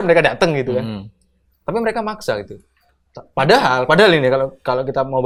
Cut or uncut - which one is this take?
uncut